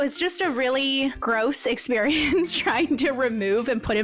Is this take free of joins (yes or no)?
no